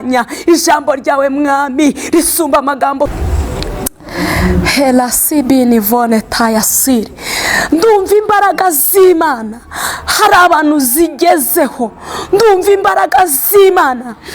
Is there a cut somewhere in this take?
yes; 1 cut; at 3.1 s

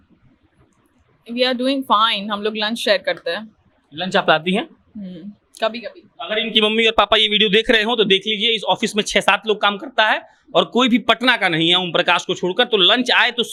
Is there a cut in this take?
no; 0 cuts

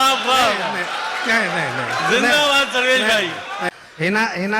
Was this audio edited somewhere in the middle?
yes; 1 cut; at 3.7 s

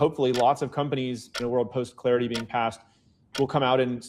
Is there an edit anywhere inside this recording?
yes; 1 cut; at 1.3 s

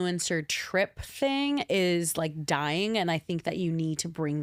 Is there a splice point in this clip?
no; 0 cuts

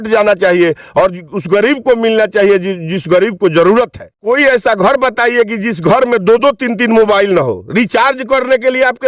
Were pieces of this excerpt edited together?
yes; 1 cut; at 4.1 s

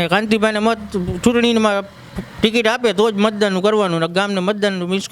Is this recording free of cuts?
yes; 0 cuts

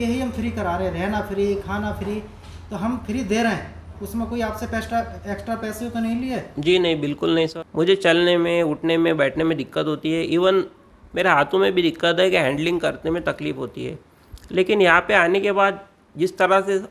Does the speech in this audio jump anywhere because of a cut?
yes; 1 cut; at 7.5 s

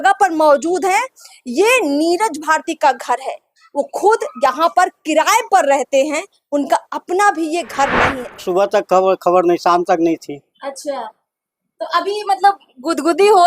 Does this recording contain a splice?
yes; 1 cut; at 8.4 s

